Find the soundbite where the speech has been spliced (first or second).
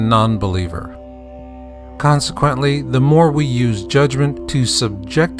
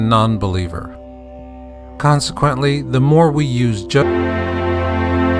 first